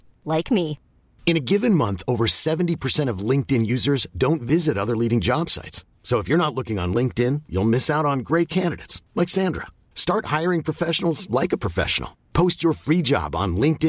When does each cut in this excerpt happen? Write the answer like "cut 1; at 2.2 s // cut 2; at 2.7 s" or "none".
none

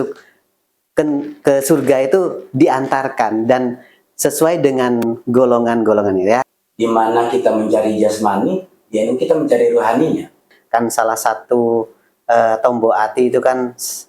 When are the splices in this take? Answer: cut 1; at 6.6 s // cut 2; at 10.5 s

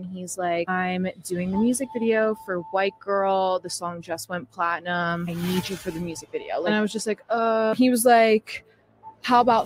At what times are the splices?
none

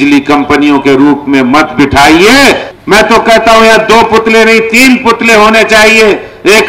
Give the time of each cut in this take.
cut 1; at 2.7 s

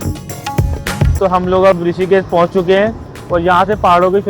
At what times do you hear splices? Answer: cut 1; at 1.1 s

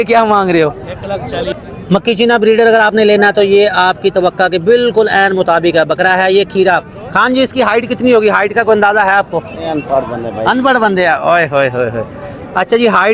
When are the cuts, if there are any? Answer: cut 1; at 1.5 s

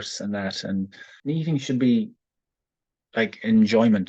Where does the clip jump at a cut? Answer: cut 1; at 1.1 s

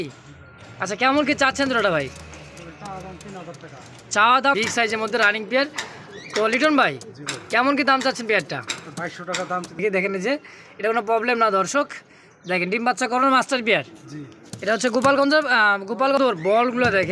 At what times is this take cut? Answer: cut 1; at 4.5 s // cut 2; at 9.8 s // cut 3; at 16.2 s

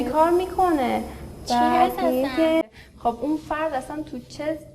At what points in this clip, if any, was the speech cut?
cut 1; at 2.6 s

